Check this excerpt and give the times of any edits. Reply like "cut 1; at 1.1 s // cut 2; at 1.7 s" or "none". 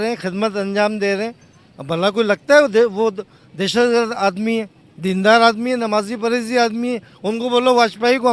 none